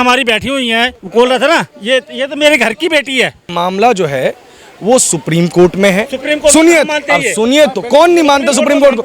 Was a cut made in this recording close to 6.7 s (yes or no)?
no